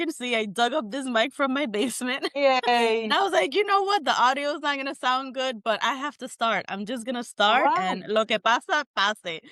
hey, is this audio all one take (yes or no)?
yes